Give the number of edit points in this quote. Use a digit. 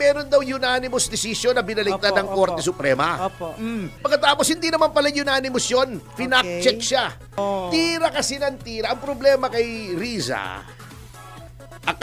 2